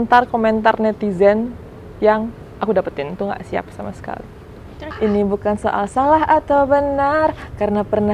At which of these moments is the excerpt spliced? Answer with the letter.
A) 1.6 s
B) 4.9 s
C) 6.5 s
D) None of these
B